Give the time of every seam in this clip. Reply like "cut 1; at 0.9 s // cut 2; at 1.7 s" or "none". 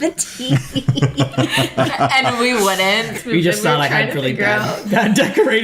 cut 1; at 3.2 s